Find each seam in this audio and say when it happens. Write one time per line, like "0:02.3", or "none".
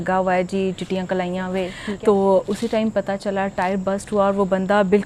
0:01.8